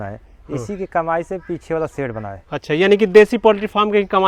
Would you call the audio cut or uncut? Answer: uncut